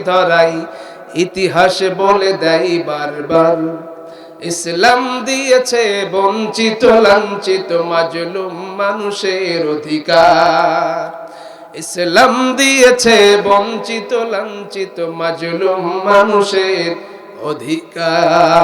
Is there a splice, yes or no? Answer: no